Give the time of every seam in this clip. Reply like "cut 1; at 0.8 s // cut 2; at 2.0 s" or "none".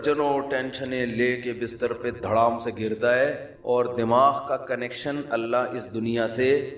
none